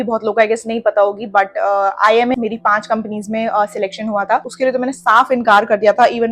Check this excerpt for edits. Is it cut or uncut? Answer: cut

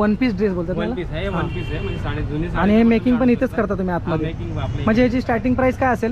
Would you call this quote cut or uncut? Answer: uncut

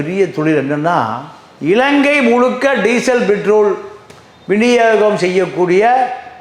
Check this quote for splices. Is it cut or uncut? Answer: uncut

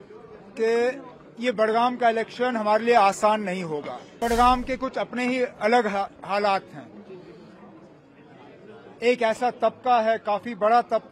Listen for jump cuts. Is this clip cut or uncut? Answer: cut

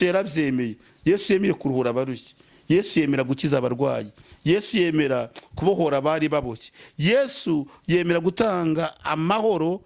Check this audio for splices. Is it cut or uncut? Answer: uncut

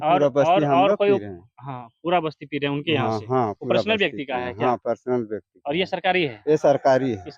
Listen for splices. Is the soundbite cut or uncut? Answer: uncut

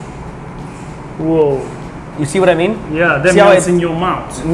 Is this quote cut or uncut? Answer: uncut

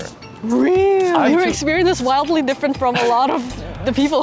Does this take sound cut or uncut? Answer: cut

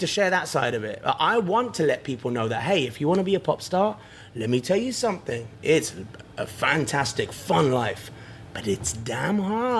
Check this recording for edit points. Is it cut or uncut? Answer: uncut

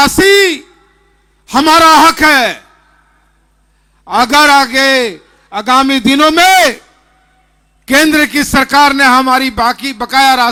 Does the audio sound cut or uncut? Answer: uncut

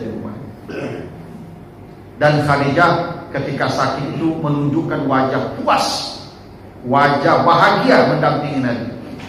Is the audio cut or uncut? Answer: uncut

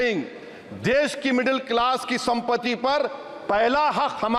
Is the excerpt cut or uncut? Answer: uncut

